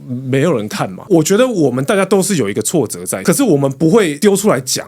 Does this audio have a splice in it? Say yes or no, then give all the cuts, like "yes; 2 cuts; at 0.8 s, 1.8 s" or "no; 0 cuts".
yes; 2 cuts; at 1.0 s, 3.2 s